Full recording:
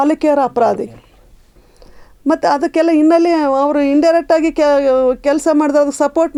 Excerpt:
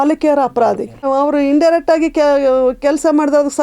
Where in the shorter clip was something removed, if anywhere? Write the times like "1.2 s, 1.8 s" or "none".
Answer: 1.0 s